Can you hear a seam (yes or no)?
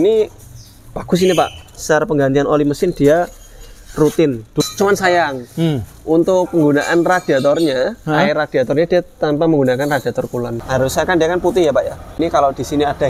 yes